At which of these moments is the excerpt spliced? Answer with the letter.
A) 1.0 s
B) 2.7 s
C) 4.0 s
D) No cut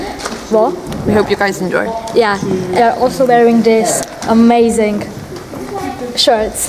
B